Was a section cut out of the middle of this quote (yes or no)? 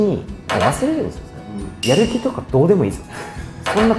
yes